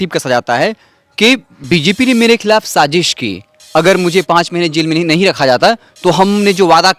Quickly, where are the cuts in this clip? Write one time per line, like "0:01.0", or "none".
none